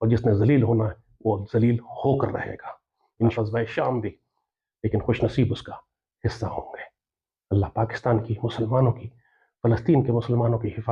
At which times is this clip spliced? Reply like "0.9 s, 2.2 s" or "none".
3.3 s

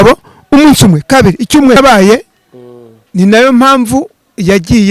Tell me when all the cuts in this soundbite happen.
1.8 s

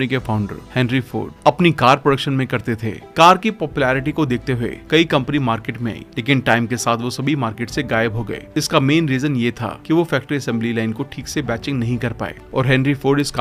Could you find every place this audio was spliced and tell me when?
none

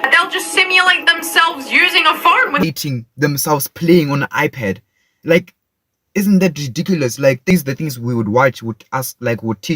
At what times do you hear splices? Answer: 2.6 s, 7.5 s

